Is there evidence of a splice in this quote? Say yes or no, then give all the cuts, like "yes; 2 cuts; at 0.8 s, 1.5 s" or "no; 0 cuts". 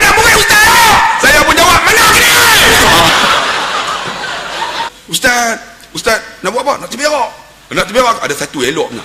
yes; 1 cut; at 4.9 s